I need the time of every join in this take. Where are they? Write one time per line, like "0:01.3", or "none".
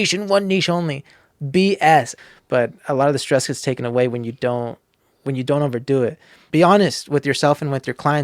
0:02.2
0:06.3